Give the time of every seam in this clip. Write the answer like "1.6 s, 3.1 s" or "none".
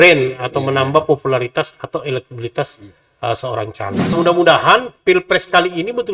4.1 s

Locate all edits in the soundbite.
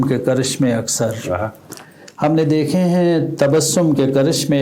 none

